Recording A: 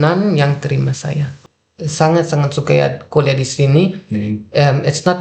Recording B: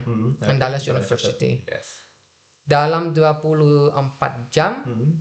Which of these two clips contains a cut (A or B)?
A